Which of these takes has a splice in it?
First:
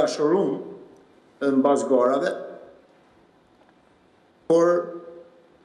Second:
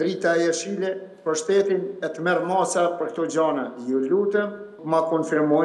second; 1 cut; at 4.7 s

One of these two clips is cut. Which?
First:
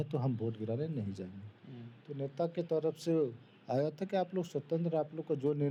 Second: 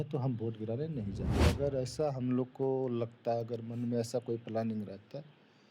second; 1 cut; at 1.3 s

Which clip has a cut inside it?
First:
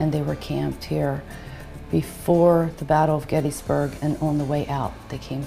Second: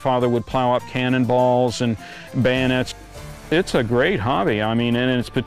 second; 1 cut; at 2.9 s

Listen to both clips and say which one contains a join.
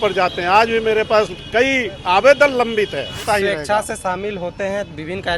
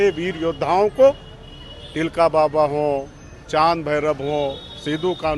first; 1 cut; at 3.2 s

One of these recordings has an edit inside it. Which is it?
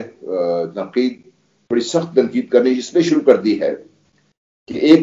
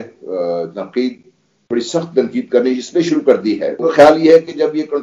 second; 1 cut; at 3.8 s

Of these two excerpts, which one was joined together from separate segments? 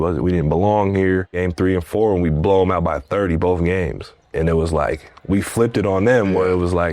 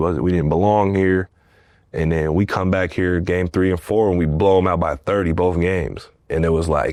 first; 1 cut; at 1.3 s

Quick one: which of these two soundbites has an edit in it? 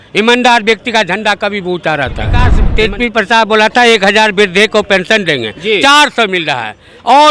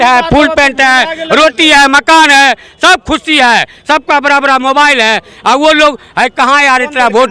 first; 1 cut; at 2.6 s

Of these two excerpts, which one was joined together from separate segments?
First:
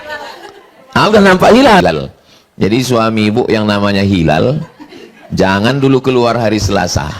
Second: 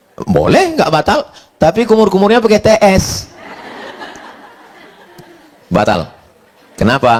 first; 1 cut; at 1.8 s

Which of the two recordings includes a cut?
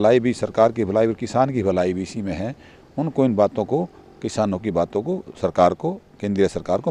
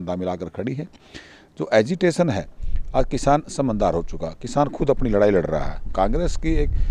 second; 1 cut; at 5.9 s

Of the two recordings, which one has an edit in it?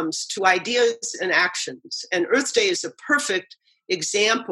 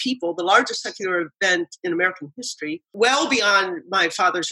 second; 1 cut; at 2.9 s

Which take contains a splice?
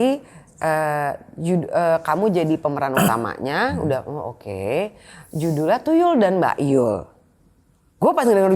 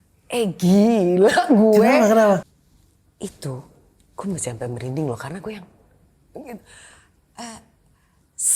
second; 1 cut; at 2.5 s

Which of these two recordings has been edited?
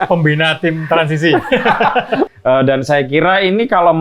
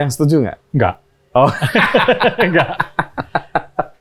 first; 1 cut; at 2.3 s

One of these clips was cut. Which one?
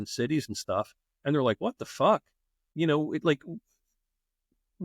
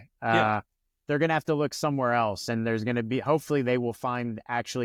first; 1 cut; at 2.7 s

